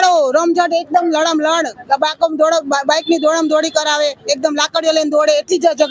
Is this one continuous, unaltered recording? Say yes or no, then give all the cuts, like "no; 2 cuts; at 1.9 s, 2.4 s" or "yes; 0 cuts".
yes; 0 cuts